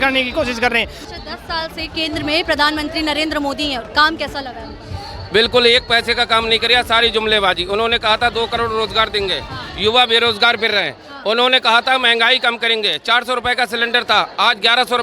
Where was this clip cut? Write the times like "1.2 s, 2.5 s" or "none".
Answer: 1.0 s